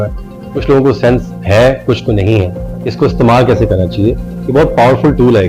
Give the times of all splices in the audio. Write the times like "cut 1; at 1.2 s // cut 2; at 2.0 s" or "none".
none